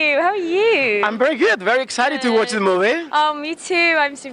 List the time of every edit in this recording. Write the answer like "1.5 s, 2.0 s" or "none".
none